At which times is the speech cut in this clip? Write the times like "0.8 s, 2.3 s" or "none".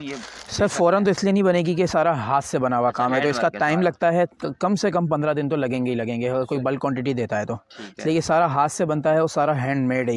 none